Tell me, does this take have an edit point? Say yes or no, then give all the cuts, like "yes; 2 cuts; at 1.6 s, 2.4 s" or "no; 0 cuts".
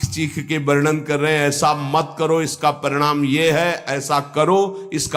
no; 0 cuts